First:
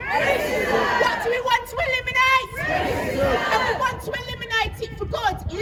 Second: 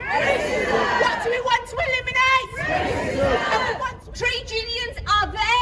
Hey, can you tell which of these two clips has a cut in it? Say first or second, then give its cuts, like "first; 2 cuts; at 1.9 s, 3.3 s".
second; 1 cut; at 4.0 s